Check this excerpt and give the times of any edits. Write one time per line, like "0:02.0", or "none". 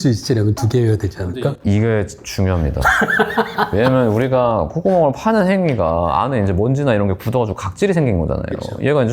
none